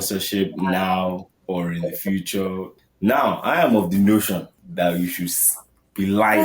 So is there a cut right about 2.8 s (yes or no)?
yes